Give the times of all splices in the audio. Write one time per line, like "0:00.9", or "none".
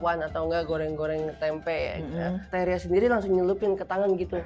0:02.4